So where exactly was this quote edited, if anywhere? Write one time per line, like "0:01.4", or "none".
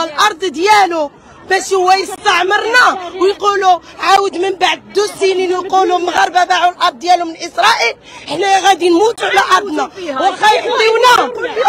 none